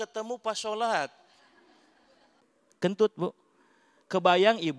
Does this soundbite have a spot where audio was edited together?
yes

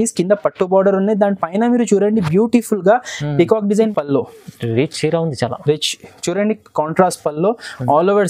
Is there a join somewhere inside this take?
yes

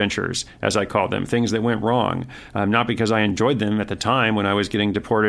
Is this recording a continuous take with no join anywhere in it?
yes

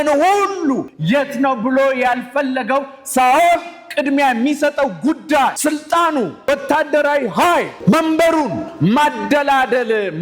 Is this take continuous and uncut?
no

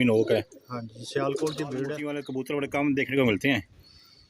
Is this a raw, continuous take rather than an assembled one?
no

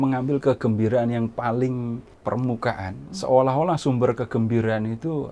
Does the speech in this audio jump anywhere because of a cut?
yes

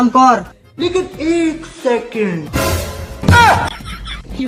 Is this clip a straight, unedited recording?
yes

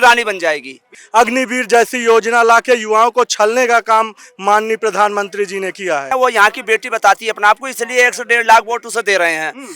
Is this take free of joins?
no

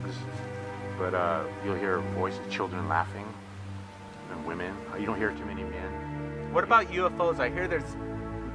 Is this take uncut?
yes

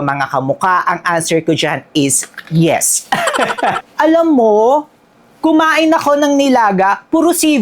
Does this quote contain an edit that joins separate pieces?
yes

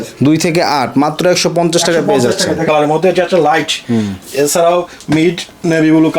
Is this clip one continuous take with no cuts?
no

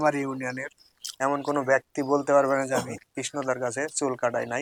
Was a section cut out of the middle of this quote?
no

